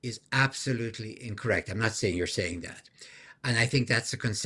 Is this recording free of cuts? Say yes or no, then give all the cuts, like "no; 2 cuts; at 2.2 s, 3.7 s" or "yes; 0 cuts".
yes; 0 cuts